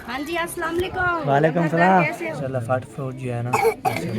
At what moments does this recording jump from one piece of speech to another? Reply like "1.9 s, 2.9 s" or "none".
2.3 s